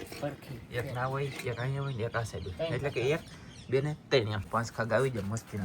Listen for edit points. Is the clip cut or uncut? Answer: cut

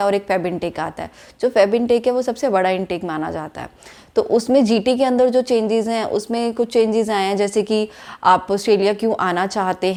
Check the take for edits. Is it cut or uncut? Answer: uncut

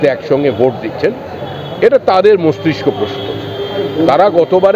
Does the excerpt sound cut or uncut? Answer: uncut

